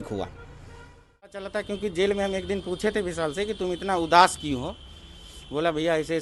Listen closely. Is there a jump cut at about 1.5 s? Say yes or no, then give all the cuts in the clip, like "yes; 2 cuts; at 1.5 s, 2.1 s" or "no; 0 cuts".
yes; 1 cut; at 1.5 s